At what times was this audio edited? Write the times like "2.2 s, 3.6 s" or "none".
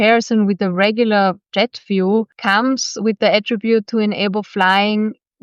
1.4 s, 2.3 s

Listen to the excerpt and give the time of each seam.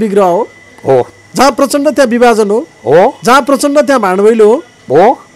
none

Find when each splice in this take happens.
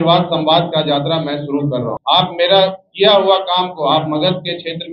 1.9 s

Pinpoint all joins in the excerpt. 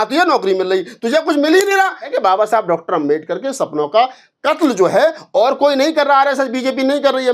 2.1 s

